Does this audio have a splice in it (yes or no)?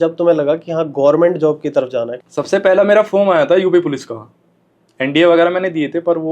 yes